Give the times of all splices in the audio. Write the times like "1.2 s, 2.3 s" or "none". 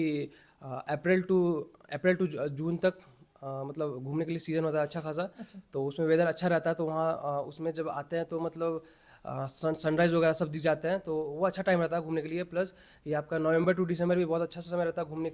none